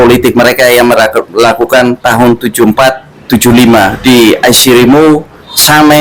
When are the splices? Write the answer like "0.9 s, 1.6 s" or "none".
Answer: none